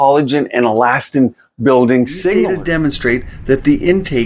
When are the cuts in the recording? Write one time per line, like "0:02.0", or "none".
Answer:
0:02.3